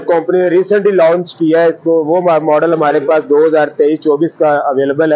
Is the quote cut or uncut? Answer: uncut